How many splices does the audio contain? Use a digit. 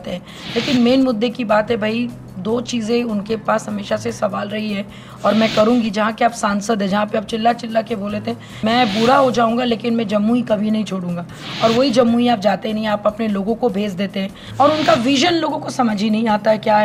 2